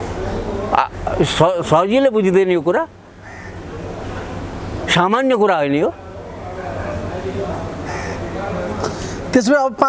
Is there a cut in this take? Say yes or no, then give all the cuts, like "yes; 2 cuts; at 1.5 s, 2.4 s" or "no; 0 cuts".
no; 0 cuts